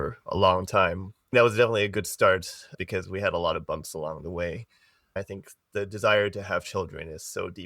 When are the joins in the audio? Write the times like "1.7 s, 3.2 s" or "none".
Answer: 1.3 s, 5.2 s